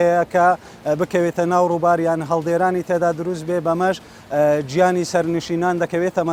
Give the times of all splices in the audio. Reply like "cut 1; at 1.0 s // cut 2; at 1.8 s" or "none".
none